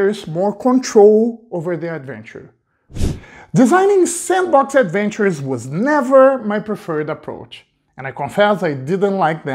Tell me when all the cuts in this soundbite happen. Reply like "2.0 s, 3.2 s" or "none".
3.0 s